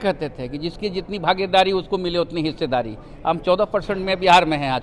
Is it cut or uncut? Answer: uncut